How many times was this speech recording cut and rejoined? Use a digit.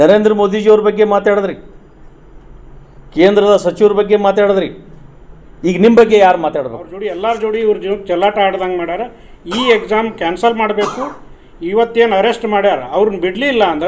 1